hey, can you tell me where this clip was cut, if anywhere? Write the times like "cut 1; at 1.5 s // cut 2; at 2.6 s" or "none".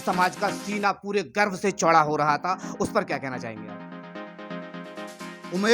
none